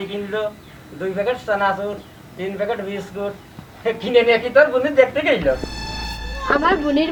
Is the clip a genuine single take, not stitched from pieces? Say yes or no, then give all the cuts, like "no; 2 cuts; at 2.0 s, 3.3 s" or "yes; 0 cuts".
yes; 0 cuts